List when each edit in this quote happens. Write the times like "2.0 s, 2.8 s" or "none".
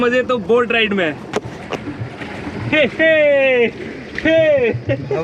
3.9 s